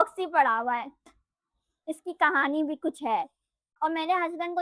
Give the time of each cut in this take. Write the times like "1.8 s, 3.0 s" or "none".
3.6 s